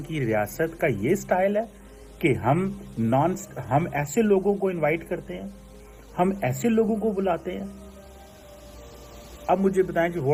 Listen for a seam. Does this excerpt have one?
no; 0 cuts

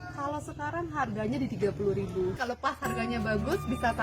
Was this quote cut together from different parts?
yes; 1 cut; at 2.5 s

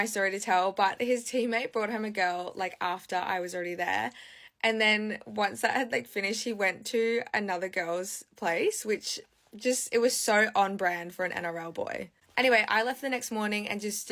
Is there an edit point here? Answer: no; 0 cuts

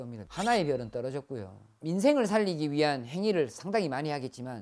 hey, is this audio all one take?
no; 1 cut; at 1.8 s

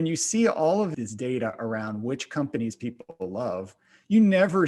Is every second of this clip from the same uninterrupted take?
no; 1 cut; at 0.9 s

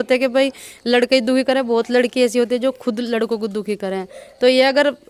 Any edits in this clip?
no; 0 cuts

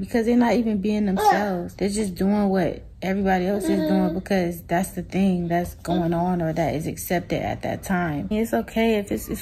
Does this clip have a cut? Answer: yes; 2 cuts; at 1.7 s, 8.2 s

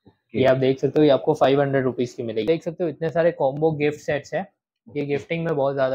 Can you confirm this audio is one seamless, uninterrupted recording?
no; 1 cut; at 2.4 s

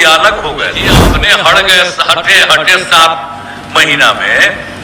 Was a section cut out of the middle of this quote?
yes; 1 cut; at 1.1 s

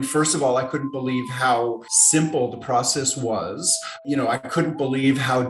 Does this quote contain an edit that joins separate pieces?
yes; 2 cuts; at 1.9 s, 4.0 s

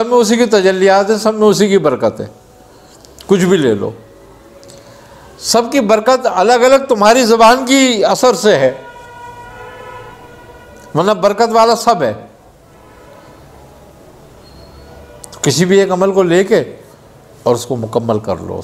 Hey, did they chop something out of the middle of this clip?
no; 0 cuts

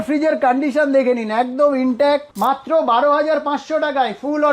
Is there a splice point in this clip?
yes; 1 cut; at 2.3 s

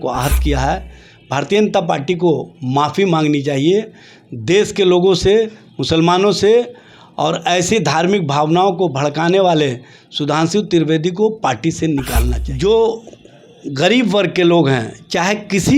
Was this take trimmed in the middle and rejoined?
yes; 1 cut; at 12.4 s

